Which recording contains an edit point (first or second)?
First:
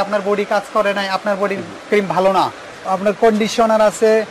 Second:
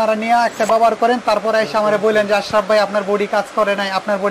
first